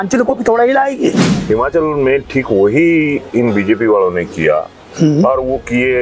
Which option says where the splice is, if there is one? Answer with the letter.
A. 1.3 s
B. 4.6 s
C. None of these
A